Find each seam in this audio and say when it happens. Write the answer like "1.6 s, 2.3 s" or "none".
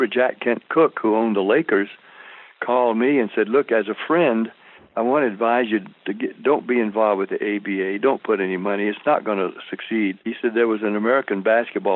10.3 s